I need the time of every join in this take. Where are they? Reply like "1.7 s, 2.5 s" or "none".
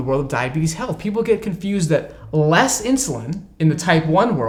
none